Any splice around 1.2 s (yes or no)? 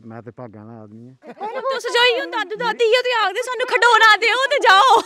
yes